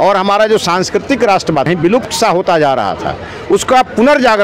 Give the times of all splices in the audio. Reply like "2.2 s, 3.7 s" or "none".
1.7 s